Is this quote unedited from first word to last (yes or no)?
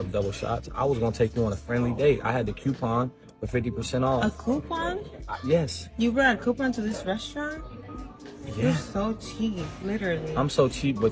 no